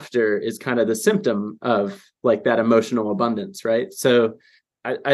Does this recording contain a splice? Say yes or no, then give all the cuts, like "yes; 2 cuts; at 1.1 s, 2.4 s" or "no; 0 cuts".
no; 0 cuts